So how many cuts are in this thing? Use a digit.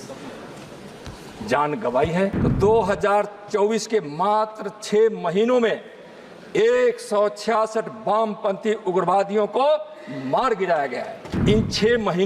2